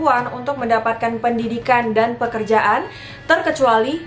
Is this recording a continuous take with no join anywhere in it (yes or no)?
yes